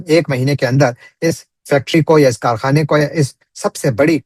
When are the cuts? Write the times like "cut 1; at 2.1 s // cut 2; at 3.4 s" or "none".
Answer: none

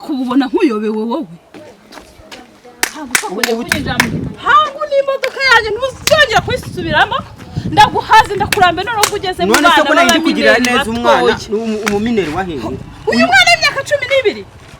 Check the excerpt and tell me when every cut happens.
cut 1; at 1.7 s

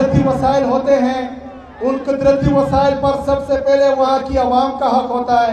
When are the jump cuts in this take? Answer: none

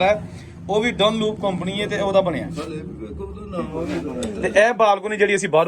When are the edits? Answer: cut 1; at 4.2 s

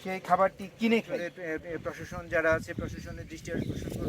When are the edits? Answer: cut 1; at 1.1 s

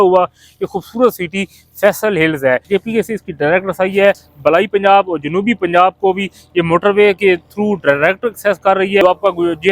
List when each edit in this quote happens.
cut 1; at 2.6 s // cut 2; at 4.3 s // cut 3; at 9.0 s

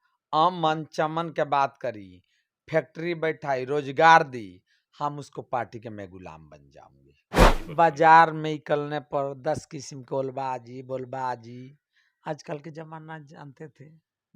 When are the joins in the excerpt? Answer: cut 1; at 7.5 s

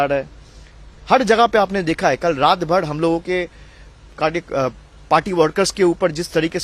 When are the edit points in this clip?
none

